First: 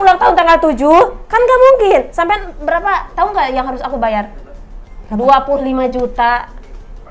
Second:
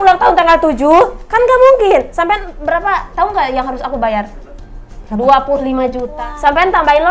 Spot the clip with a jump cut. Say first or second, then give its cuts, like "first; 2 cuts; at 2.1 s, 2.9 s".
second; 1 cut; at 6.1 s